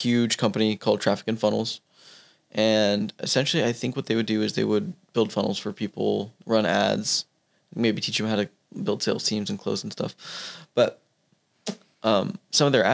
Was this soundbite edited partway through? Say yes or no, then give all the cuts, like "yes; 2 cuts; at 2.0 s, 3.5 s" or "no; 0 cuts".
no; 0 cuts